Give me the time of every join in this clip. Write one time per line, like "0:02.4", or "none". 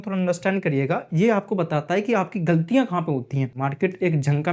0:03.5

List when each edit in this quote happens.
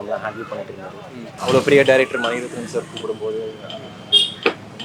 0:01.3

